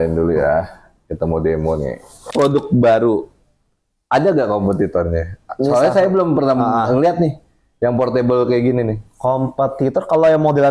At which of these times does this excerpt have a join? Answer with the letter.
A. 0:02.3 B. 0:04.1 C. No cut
A